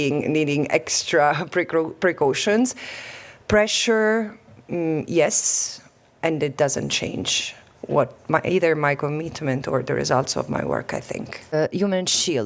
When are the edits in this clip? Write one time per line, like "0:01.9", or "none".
0:11.5

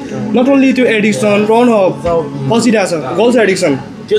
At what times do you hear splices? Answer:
0:01.5
0:03.1

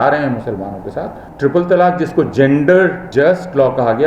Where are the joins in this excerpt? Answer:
0:01.2
0:03.0

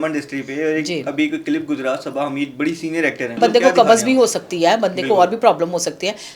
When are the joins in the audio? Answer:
0:03.4

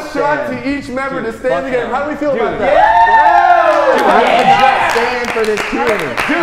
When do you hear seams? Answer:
none

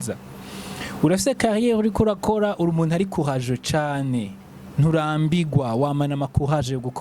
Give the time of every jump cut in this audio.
none

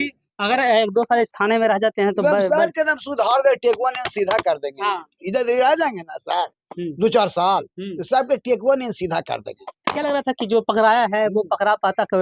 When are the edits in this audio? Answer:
none

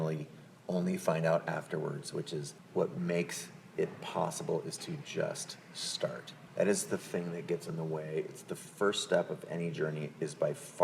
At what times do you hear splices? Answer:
none

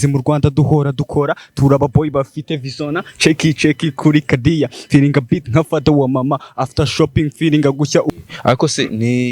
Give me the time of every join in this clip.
0:08.1

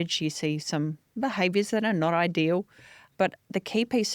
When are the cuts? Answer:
none

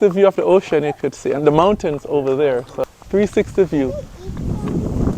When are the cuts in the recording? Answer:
0:02.8

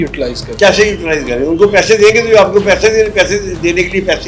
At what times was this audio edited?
none

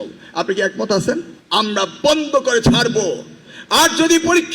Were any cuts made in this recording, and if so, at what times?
0:01.3

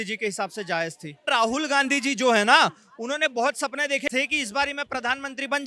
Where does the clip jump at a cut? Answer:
0:01.3
0:04.1

